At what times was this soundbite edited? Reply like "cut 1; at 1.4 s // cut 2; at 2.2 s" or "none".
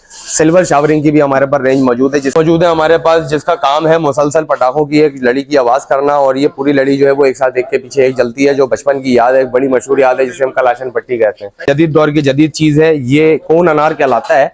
cut 1; at 2.3 s // cut 2; at 11.5 s